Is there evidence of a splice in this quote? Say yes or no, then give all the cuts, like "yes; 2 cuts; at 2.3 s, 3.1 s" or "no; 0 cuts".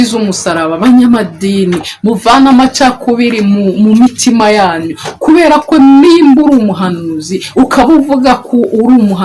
no; 0 cuts